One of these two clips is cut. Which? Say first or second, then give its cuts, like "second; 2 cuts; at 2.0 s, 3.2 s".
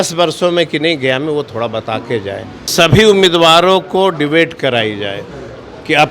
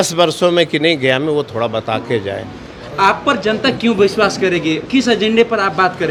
first; 1 cut; at 2.7 s